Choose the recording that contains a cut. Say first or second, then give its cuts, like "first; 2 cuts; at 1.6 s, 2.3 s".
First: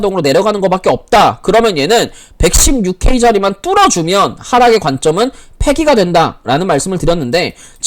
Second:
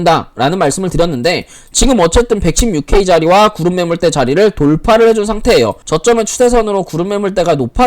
second; 1 cut; at 5.8 s